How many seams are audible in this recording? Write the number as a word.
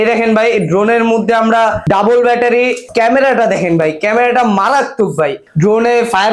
three